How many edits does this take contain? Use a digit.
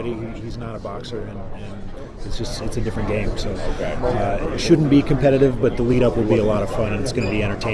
0